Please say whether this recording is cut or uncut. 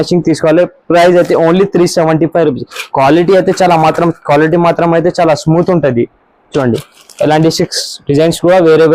uncut